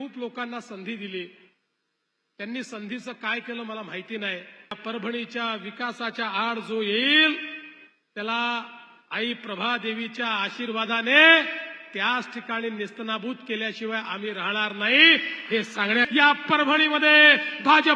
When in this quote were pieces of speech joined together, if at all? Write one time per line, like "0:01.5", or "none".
0:04.8
0:16.1